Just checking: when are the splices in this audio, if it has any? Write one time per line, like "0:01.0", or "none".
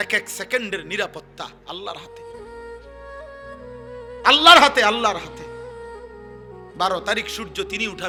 none